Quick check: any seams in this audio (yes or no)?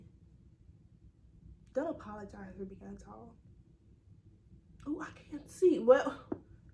yes